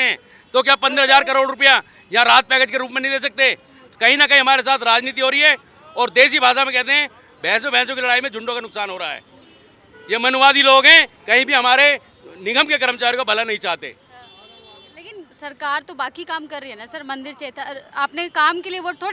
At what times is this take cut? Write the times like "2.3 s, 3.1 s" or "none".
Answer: none